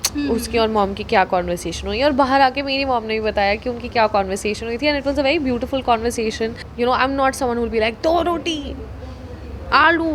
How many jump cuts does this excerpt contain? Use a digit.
1